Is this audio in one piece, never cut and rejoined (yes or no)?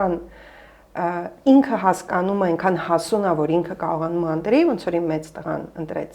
yes